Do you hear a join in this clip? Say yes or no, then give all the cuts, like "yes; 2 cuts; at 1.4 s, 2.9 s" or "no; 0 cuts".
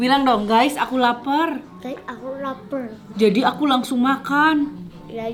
no; 0 cuts